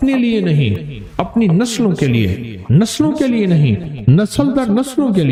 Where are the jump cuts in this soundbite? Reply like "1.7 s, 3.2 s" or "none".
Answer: none